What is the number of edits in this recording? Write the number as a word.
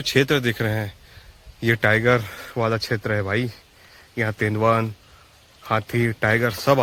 zero